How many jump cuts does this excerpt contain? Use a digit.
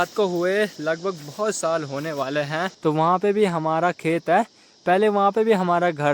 1